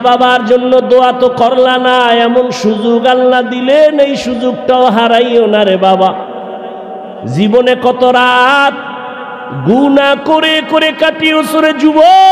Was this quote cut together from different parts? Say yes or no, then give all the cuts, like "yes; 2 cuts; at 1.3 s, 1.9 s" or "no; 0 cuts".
no; 0 cuts